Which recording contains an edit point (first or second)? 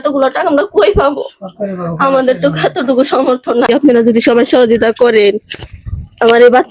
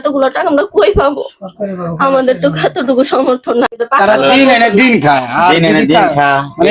first